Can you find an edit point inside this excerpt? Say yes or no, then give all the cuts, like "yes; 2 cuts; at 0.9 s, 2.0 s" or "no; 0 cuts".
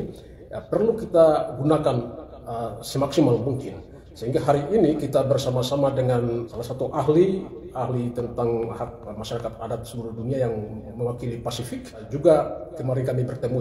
yes; 2 cuts; at 6.5 s, 12.1 s